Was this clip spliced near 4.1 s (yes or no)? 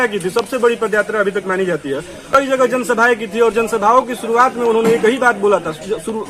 no